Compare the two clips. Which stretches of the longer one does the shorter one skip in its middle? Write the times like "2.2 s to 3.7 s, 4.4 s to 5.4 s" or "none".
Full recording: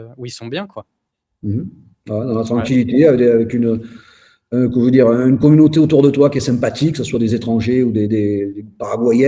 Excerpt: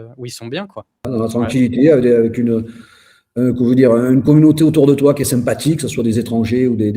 1.0 s to 2.2 s